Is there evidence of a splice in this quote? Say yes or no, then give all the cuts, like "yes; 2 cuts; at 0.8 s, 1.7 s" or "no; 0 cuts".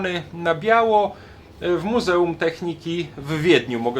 no; 0 cuts